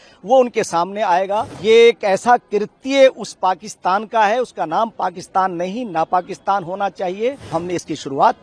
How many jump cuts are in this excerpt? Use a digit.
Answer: 2